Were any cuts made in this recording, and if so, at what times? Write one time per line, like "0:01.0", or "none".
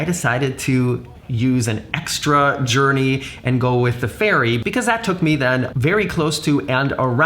0:01.2